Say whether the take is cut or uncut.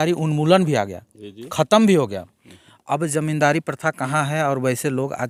uncut